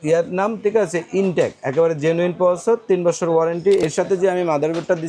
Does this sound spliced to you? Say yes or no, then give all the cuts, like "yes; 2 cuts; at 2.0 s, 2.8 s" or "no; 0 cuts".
yes; 1 cut; at 3.8 s